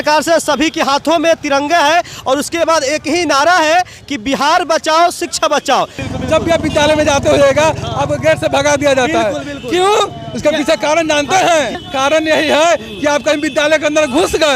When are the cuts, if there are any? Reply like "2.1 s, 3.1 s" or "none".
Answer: 6.1 s, 11.8 s

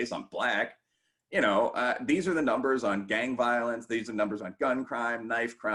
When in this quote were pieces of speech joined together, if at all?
none

